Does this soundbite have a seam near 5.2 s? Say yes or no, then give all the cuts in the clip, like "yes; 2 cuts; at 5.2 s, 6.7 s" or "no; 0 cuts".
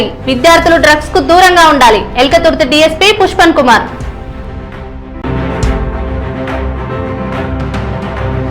yes; 1 cut; at 5.2 s